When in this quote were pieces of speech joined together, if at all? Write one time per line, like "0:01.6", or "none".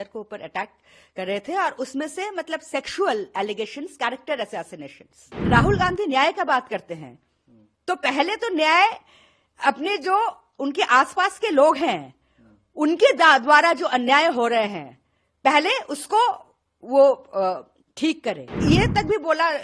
0:05.3
0:18.5

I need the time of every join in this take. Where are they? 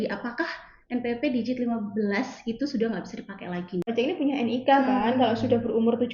0:03.9

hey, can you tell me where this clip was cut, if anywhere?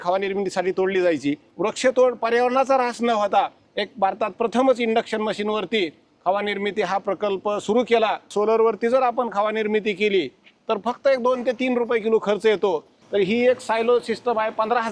0:01.5
0:08.3
0:13.0

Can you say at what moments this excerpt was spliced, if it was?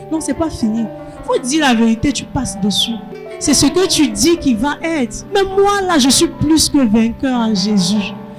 0:03.0
0:05.2

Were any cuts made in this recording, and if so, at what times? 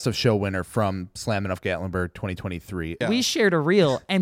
0:03.0

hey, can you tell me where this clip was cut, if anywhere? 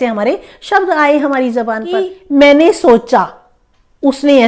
0:02.1

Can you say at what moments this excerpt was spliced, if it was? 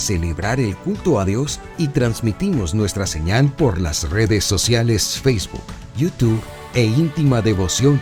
none

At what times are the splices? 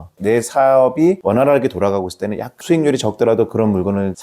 0:02.5

